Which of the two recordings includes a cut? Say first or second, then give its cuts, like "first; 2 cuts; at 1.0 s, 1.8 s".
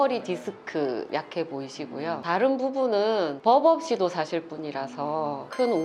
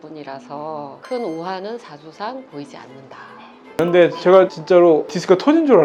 second; 1 cut; at 3.8 s